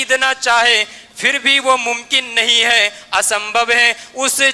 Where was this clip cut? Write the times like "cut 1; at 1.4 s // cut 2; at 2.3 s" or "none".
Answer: none